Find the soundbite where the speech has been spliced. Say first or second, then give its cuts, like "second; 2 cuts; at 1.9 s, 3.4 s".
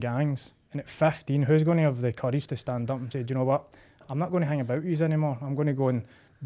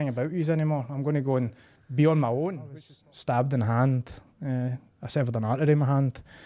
second; 1 cut; at 2.8 s